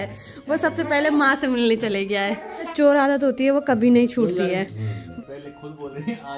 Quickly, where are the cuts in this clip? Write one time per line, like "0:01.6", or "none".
0:02.7
0:05.0

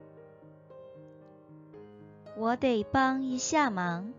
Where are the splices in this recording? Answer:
0:02.4

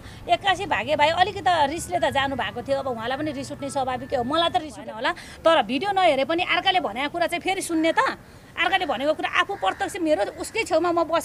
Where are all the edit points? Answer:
0:04.8

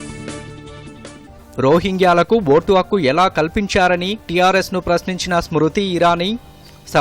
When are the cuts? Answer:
0:01.2

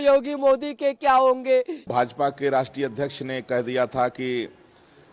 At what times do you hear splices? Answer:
0:01.8

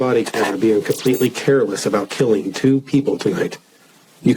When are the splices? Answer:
none

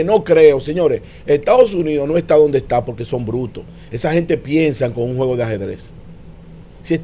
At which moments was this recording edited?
none

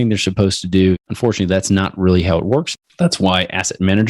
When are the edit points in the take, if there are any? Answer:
0:01.1
0:02.7

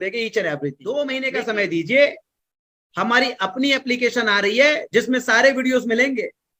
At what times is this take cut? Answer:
0:01.0

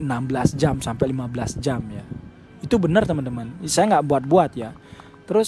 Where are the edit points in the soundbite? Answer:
none

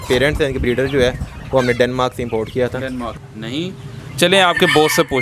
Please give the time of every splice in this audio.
0:03.2

